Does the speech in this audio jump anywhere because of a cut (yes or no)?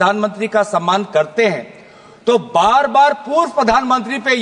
no